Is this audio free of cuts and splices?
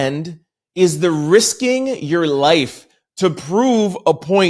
yes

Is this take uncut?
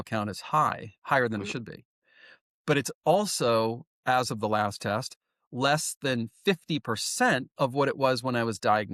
yes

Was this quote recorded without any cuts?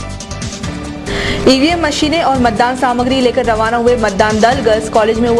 no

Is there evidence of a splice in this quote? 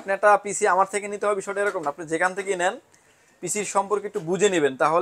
no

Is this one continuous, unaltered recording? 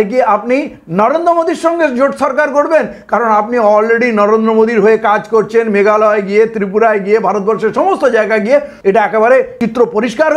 no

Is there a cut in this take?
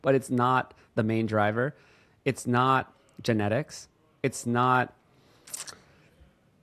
no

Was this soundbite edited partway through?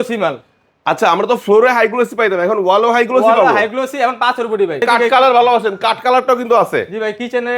yes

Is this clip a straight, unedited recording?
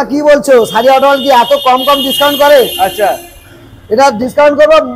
yes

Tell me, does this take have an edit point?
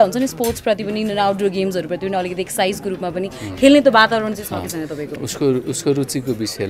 yes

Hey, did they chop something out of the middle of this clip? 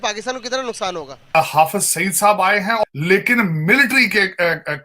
yes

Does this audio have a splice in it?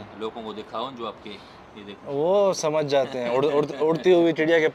no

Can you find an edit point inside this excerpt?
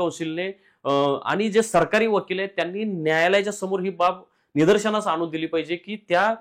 no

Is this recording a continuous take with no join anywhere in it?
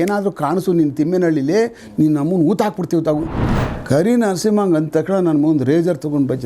no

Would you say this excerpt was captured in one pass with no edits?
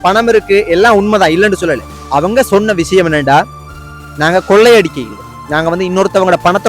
no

